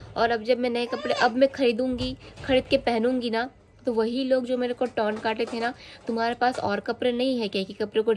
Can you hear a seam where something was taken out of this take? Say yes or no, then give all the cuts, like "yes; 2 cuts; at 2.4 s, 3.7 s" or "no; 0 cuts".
no; 0 cuts